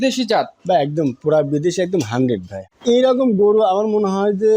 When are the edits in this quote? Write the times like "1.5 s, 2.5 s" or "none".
2.7 s